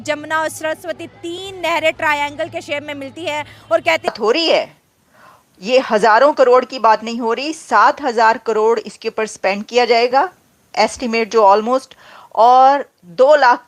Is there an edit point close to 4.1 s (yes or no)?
yes